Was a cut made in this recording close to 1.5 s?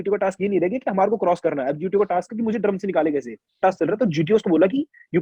no; 1 cut; at 3.6 s

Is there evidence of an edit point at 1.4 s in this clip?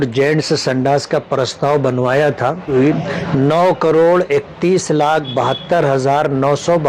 no; 1 cut; at 2.7 s

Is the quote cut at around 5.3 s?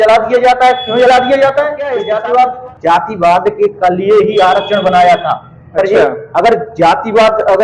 no; 1 cut; at 1.9 s

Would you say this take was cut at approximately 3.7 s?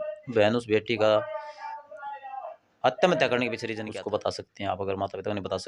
yes; 1 cut; at 3.7 s

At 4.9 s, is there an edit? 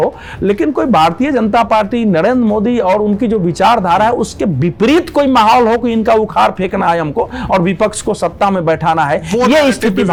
no; 0 cuts

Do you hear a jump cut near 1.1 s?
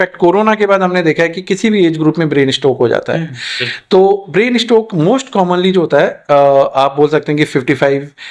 no; 0 cuts

